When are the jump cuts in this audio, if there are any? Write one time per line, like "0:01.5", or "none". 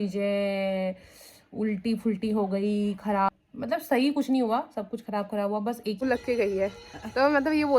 0:03.3
0:06.0